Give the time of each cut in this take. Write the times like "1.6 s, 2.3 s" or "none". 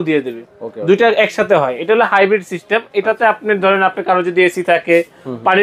none